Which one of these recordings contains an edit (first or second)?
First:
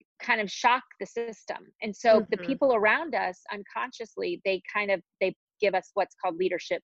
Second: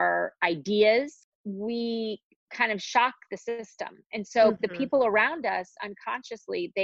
second